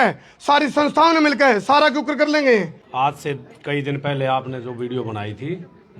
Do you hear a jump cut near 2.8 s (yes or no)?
yes